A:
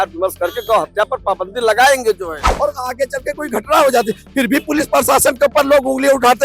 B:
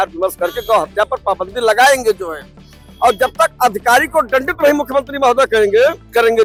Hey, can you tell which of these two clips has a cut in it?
A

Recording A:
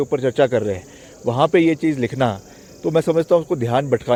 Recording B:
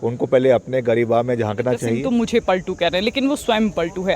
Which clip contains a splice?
B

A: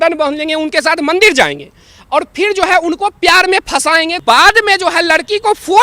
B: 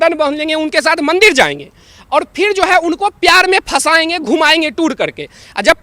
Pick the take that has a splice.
A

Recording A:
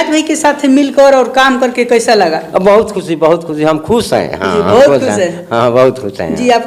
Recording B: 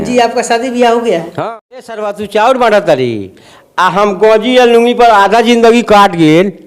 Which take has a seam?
B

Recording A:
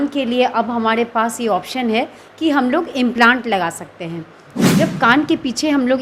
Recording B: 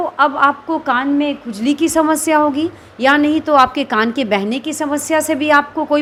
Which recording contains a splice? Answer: A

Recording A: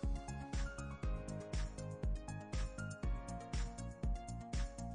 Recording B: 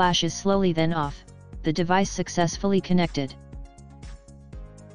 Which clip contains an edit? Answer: B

